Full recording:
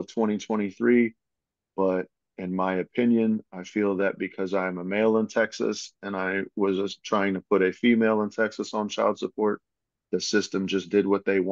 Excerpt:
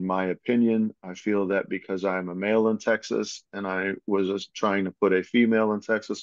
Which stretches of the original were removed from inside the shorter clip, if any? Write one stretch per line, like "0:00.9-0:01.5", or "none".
none